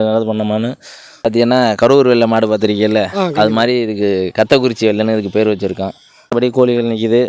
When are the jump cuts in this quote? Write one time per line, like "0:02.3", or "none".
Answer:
0:01.2
0:06.3